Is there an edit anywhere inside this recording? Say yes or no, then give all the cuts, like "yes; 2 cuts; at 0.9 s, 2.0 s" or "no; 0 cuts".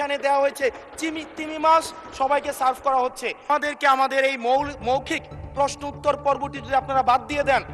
yes; 1 cut; at 3.5 s